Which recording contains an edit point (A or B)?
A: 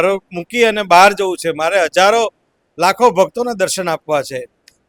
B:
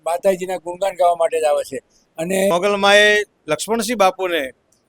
B